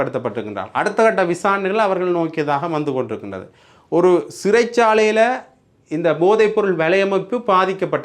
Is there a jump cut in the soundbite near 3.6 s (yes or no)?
no